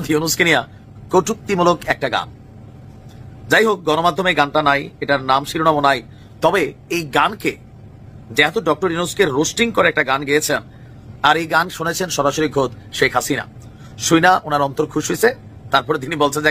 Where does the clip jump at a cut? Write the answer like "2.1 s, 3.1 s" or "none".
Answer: none